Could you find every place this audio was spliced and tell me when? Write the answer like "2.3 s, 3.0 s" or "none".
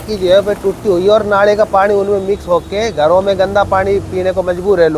none